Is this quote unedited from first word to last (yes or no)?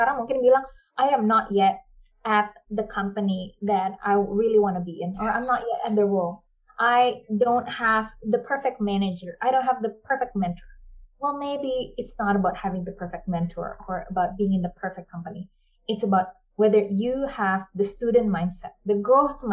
yes